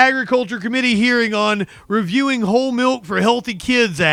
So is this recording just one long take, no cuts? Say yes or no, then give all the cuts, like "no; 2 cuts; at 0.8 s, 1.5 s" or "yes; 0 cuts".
yes; 0 cuts